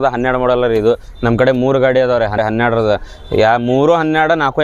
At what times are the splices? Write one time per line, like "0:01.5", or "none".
0:02.4